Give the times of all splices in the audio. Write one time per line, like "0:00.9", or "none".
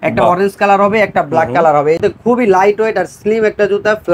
0:02.0